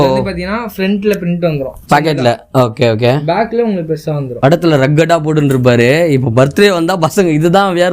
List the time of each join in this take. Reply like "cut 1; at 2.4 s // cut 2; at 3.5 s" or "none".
cut 1; at 4.3 s